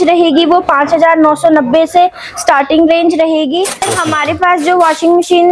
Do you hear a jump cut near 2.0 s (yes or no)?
no